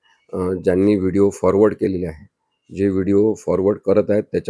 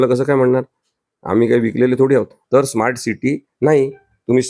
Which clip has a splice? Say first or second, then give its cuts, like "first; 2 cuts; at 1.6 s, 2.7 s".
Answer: second; 1 cut; at 2.4 s